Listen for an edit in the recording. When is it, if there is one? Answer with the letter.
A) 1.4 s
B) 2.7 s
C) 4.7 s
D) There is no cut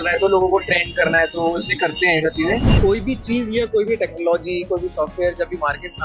B